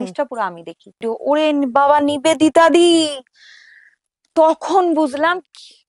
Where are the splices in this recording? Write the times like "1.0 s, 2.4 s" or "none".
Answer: 1.0 s